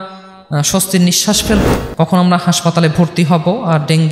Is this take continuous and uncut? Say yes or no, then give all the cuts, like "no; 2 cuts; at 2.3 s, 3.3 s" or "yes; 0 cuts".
no; 1 cut; at 1.6 s